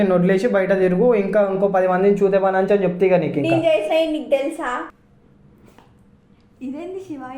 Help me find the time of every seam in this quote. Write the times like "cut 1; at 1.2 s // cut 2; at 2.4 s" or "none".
cut 1; at 4.9 s